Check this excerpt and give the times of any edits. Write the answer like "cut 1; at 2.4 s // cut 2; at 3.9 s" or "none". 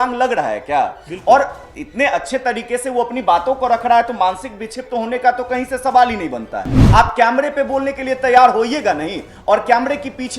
cut 1; at 6.8 s